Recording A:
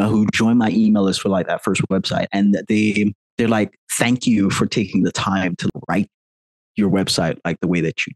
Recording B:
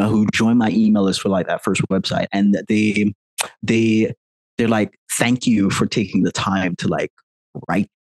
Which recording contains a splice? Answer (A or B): A